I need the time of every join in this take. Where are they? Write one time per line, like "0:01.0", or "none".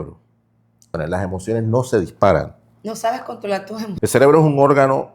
0:01.0
0:03.9

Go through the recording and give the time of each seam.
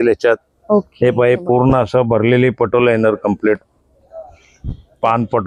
none

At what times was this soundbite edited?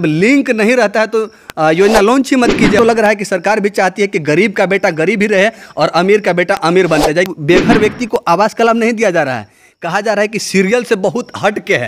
0:02.8
0:07.3

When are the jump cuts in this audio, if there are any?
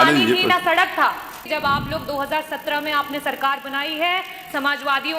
0:01.4

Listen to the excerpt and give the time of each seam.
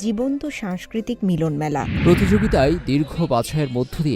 0:01.9

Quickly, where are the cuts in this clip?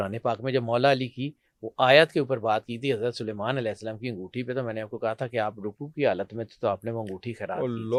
none

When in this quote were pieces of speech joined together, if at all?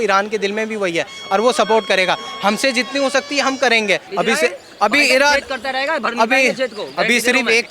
0:04.1

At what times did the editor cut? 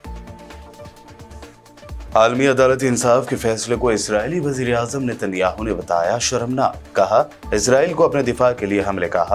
0:00.9

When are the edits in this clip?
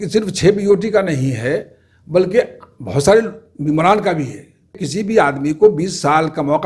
0:04.9

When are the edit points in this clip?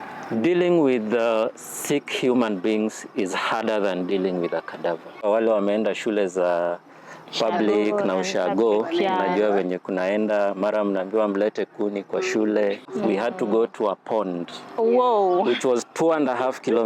0:05.2
0:12.9

